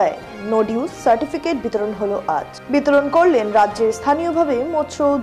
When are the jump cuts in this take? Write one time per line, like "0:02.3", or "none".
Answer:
none